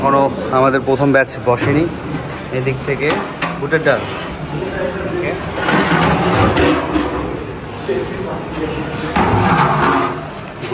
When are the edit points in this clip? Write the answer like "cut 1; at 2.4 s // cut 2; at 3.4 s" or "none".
none